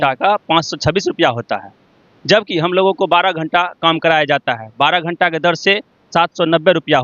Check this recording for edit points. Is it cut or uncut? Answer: uncut